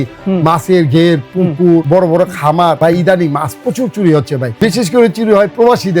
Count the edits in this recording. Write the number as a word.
three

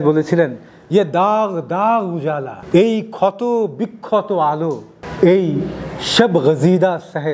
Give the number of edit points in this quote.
one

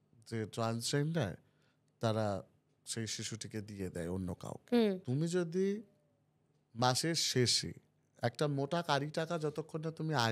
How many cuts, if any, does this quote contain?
one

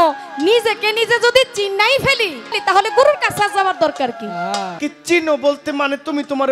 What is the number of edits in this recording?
two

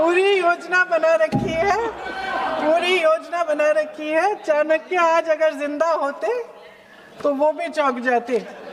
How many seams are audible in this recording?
zero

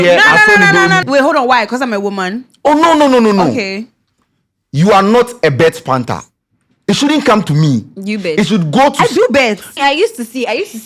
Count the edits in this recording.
two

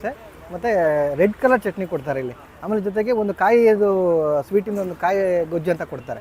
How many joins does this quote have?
zero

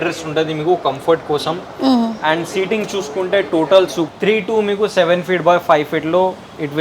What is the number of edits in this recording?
one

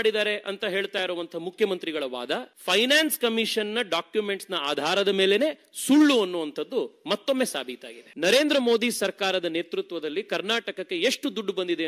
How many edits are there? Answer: two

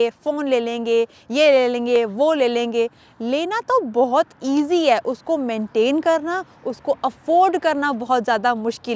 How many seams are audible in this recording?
zero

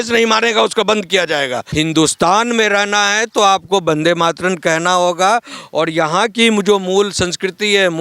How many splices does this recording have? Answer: one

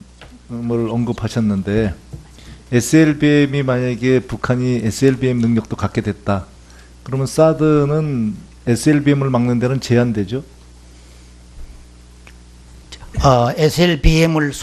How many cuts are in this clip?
zero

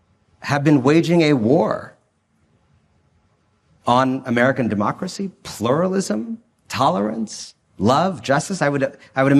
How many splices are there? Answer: zero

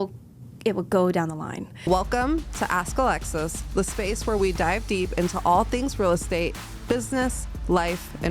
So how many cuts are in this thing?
one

